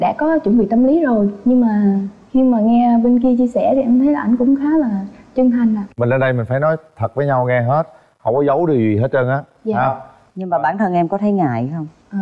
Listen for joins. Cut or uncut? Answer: uncut